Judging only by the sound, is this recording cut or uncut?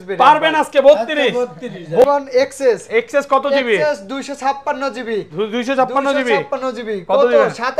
cut